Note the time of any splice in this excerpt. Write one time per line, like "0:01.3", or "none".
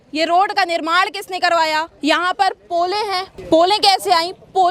0:01.9
0:03.3